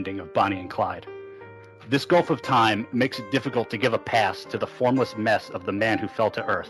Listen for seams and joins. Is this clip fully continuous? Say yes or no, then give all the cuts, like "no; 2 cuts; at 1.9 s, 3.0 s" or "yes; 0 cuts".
yes; 0 cuts